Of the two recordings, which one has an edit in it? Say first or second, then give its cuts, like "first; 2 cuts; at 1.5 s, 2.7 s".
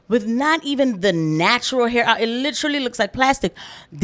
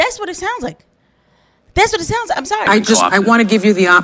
second; 1 cut; at 2.7 s